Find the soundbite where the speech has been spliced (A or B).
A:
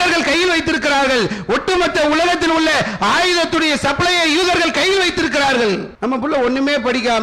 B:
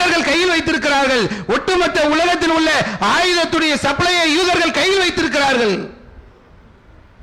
A